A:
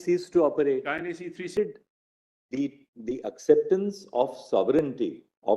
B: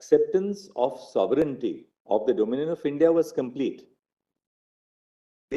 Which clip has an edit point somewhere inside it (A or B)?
A